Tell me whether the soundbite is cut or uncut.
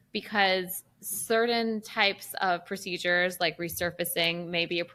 uncut